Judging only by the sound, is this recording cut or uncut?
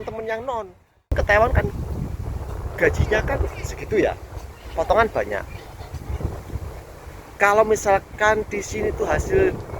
cut